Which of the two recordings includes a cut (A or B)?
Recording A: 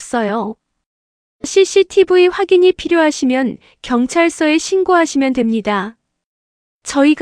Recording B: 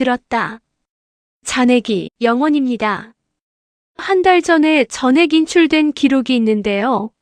B